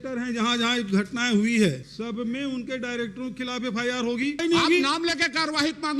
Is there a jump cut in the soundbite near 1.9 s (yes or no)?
yes